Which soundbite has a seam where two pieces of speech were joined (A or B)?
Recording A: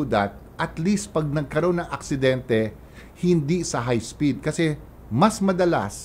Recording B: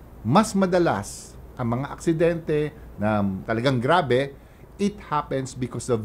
B